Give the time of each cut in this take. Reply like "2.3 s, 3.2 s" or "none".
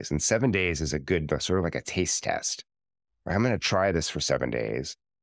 none